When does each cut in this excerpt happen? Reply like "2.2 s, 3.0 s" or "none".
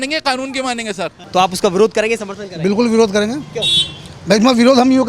1.3 s